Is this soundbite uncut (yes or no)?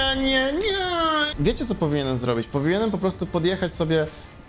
no